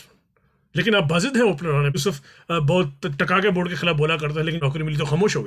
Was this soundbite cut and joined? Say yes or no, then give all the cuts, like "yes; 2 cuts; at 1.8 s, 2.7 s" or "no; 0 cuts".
yes; 2 cuts; at 2.0 s, 4.6 s